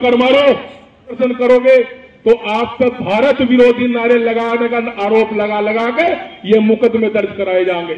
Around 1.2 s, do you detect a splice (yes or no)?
yes